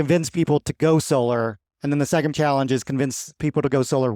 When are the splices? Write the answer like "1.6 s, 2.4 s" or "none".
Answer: 2.3 s